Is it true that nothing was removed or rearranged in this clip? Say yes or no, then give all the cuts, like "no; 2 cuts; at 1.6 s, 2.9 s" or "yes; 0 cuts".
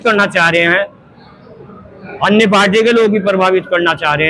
yes; 0 cuts